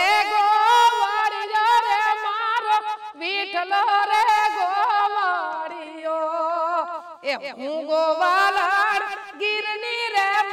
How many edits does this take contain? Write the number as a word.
zero